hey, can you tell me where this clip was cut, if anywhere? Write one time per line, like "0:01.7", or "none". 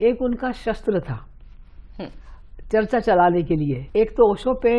0:03.8